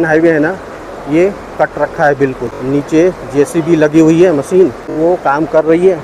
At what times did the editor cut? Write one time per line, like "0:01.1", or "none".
0:02.5
0:04.8